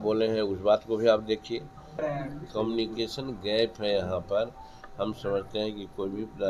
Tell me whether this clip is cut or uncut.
cut